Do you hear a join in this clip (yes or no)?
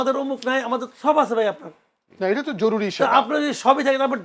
no